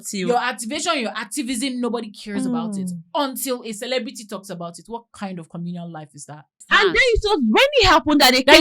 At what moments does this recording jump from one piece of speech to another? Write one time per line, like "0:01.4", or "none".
0:06.6